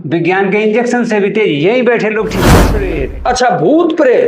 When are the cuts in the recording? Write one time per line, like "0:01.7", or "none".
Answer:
0:02.5